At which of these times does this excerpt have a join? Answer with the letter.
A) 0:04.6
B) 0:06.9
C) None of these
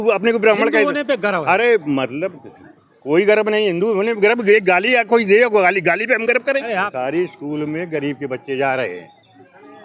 B